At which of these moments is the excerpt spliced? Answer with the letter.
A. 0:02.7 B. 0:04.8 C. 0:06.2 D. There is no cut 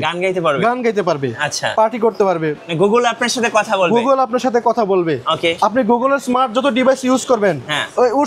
A